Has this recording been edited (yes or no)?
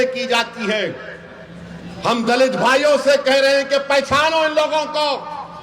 no